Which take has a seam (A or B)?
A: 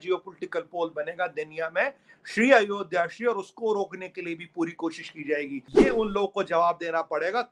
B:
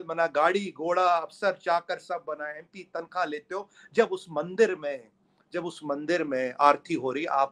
A